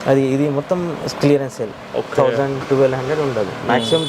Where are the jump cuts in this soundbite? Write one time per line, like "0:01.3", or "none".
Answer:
none